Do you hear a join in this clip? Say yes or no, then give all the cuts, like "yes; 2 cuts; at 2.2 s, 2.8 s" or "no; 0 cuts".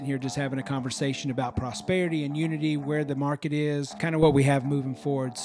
yes; 1 cut; at 4.0 s